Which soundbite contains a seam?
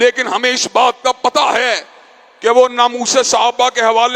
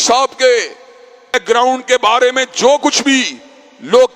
second; 1 cut; at 1.3 s

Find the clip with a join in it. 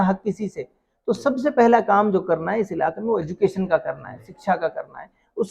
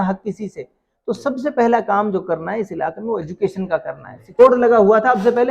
second; 1 cut; at 4.4 s

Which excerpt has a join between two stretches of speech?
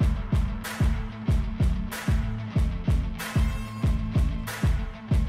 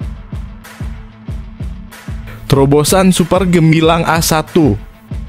second; 1 cut; at 2.5 s

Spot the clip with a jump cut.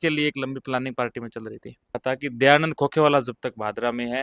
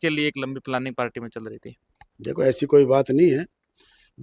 first; 1 cut; at 1.9 s

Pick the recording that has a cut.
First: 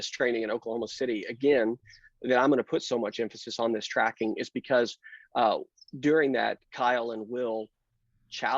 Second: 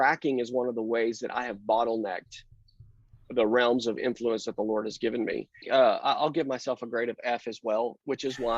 second; 1 cut; at 5.7 s

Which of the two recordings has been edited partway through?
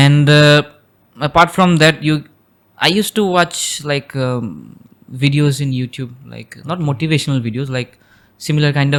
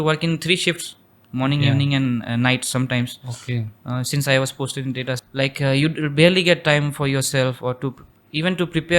second; 1 cut; at 5.2 s

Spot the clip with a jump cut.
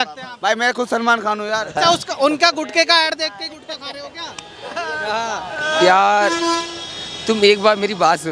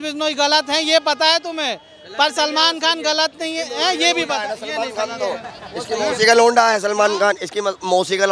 first; 1 cut; at 1.7 s

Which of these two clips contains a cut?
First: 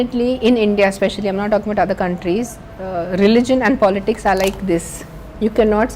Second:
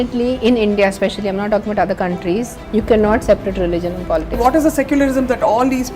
second; 2 cuts; at 2.6 s, 4.4 s

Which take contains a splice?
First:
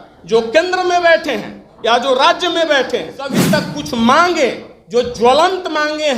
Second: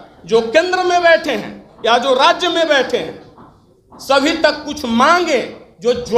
first; 1 cut; at 3.5 s

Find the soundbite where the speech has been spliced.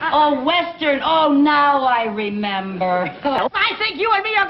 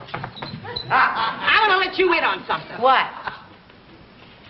first; 1 cut; at 3.4 s

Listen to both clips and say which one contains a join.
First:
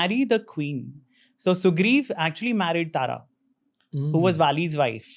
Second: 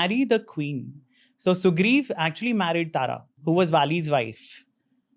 second; 1 cut; at 3.4 s

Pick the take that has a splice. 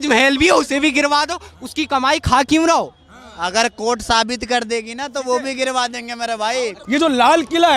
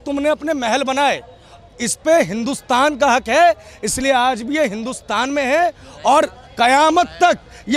first; 1 cut; at 6.8 s

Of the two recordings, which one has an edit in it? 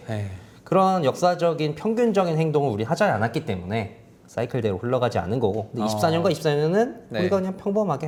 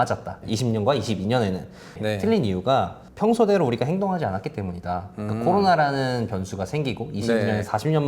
second; 1 cut; at 2.0 s

